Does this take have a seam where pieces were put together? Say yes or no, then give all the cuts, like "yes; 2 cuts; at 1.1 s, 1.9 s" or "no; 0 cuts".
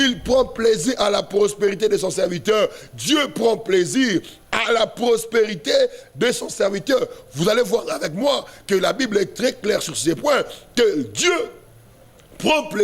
no; 0 cuts